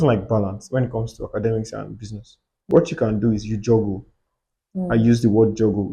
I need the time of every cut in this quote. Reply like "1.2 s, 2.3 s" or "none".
2.6 s